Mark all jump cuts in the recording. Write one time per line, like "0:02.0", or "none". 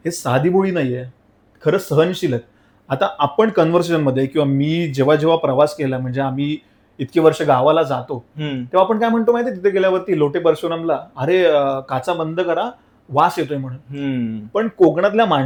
none

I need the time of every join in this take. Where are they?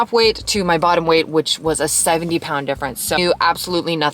0:03.2

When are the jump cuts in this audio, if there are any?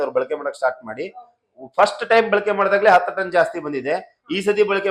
none

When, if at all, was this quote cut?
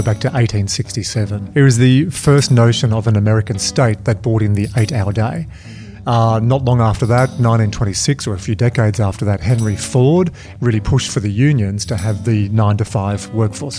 0:01.5

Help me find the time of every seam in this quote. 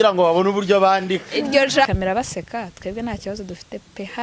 0:01.9

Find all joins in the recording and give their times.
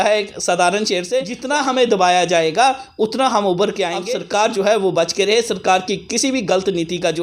0:01.4
0:04.0

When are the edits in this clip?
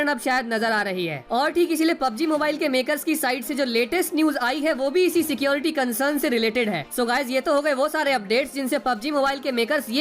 0:01.2
0:06.8

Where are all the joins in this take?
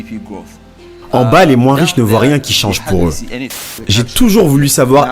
0:01.1
0:03.3

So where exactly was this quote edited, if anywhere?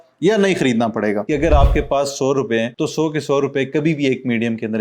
0:01.3

